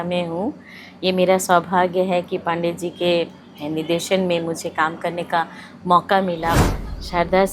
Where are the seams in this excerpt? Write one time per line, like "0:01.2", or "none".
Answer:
0:06.6